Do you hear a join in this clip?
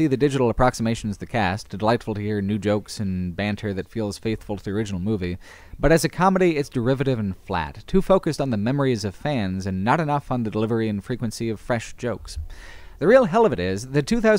yes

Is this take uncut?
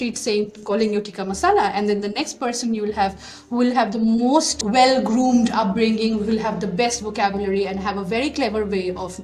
no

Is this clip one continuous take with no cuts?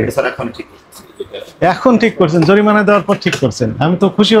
yes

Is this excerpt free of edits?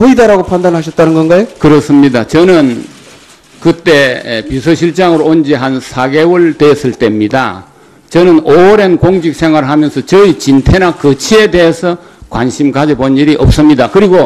yes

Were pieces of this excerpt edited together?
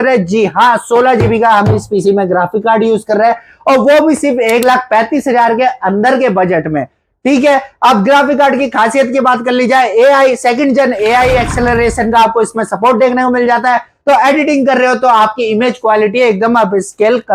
no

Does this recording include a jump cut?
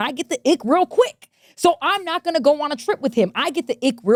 no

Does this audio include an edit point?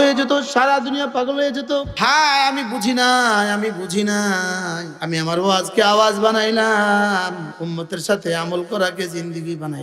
yes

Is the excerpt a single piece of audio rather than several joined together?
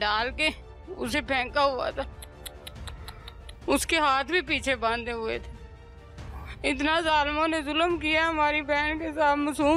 yes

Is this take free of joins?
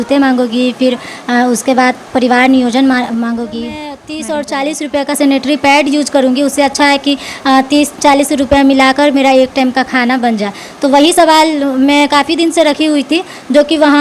no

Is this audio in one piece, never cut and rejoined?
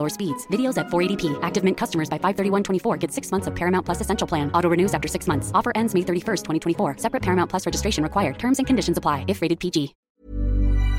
no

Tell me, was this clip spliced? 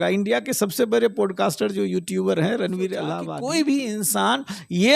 yes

